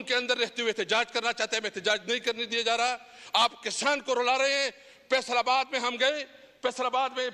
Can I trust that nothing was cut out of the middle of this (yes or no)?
yes